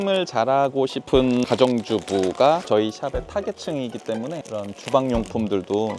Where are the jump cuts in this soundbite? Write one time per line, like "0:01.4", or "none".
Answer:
none